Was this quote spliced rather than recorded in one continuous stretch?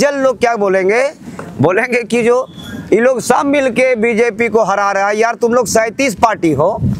no; 0 cuts

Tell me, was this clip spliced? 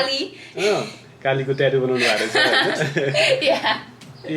no; 0 cuts

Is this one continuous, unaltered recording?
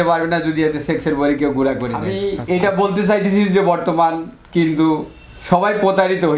no; 1 cut; at 2.1 s

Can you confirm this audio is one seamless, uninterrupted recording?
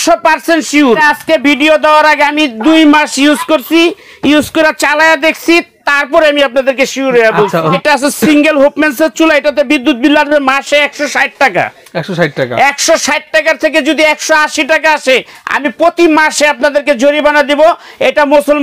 no; 2 cuts; at 1.0 s, 7.8 s

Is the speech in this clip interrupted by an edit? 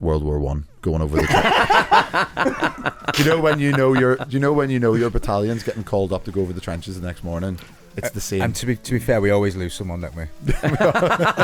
no; 0 cuts

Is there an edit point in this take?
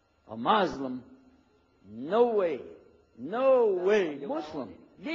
yes; 1 cut; at 4.2 s

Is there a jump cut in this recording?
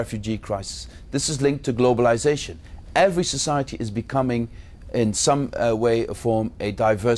no; 0 cuts

